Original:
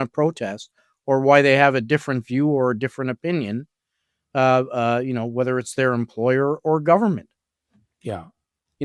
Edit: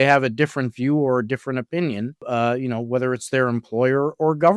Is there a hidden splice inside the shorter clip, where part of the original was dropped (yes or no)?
yes